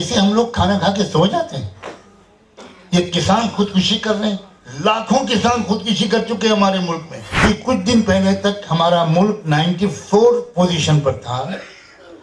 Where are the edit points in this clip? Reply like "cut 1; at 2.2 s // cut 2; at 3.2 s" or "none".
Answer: cut 1; at 7.4 s

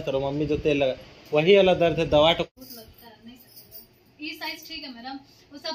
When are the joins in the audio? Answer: cut 1; at 2.5 s

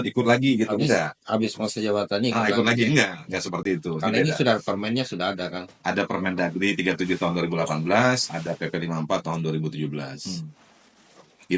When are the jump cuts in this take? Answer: none

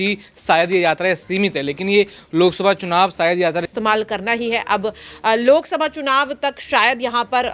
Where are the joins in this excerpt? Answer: cut 1; at 3.7 s

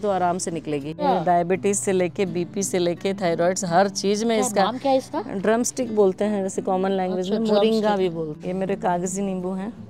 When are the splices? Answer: cut 1; at 0.9 s // cut 2; at 8.4 s

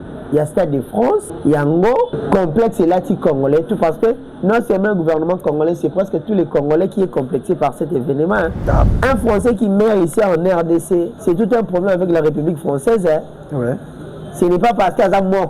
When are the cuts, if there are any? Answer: cut 1; at 1.3 s // cut 2; at 2.2 s // cut 3; at 8.9 s // cut 4; at 11.1 s

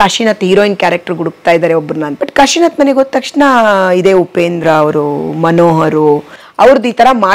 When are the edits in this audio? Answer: cut 1; at 2.1 s

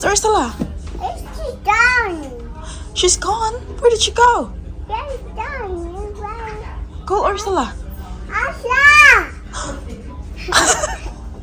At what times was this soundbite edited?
none

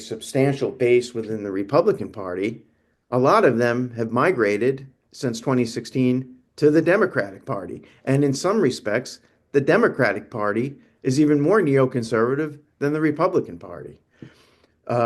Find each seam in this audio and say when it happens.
none

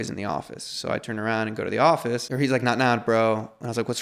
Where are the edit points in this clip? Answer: cut 1; at 2.3 s

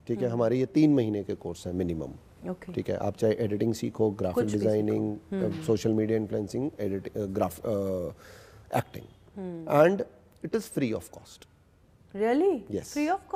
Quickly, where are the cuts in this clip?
none

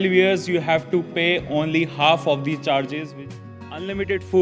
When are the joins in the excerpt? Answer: cut 1; at 3.1 s

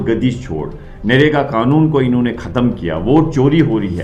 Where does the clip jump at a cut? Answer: none

